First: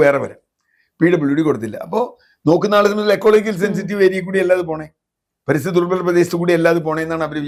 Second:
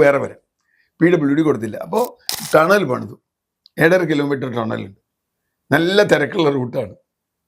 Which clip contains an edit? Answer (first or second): second